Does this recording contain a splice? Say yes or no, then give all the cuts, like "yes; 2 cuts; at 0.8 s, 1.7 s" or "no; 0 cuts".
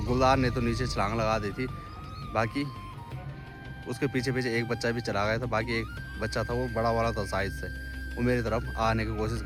no; 0 cuts